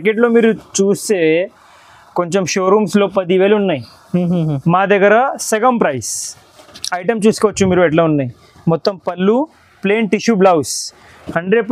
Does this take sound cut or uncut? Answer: uncut